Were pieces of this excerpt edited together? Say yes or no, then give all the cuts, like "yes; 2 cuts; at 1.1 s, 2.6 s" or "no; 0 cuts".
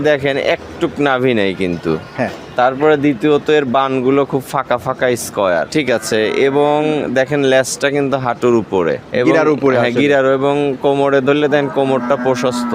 yes; 2 cuts; at 5.7 s, 9.0 s